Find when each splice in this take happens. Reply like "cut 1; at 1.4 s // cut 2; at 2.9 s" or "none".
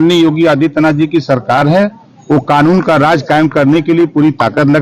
none